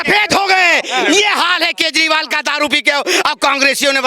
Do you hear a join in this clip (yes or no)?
no